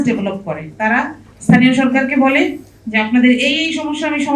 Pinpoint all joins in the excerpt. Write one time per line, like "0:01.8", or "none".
none